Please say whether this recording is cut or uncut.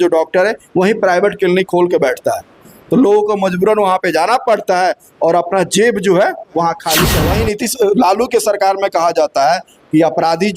cut